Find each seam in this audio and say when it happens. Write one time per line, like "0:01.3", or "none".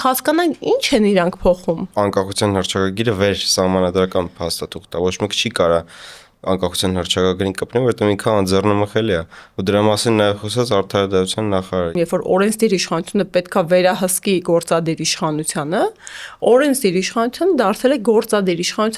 0:01.9
0:11.9

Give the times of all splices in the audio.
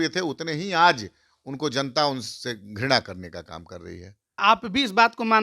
0:04.4

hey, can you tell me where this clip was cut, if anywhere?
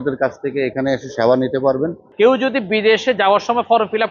0:02.0

